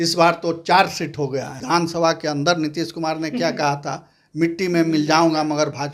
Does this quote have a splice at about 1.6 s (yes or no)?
yes